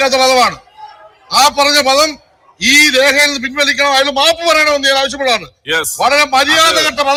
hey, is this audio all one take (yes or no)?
yes